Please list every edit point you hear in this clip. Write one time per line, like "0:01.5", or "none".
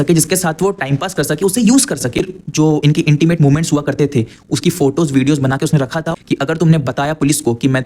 0:02.2
0:06.2